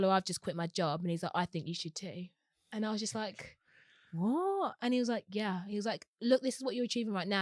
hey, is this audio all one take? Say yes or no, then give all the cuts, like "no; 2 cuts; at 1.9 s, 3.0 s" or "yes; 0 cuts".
yes; 0 cuts